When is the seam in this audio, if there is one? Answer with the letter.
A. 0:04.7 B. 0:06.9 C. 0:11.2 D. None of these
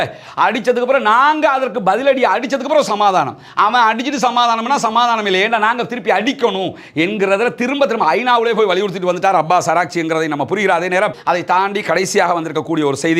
C